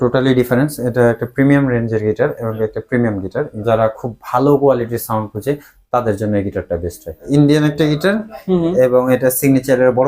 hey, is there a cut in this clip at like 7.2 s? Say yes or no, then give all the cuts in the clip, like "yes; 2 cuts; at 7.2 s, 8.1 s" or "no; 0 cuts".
yes; 2 cuts; at 3.5 s, 7.2 s